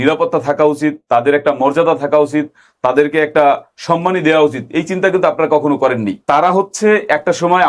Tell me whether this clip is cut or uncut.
cut